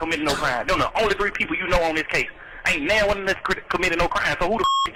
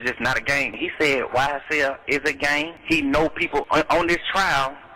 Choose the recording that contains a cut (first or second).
second